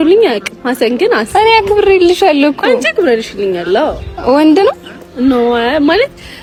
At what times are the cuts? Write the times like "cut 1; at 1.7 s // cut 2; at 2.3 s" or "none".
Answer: none